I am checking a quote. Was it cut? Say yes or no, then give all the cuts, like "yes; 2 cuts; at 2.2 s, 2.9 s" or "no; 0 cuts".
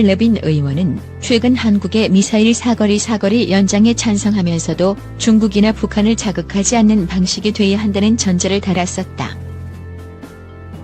yes; 1 cut; at 9.7 s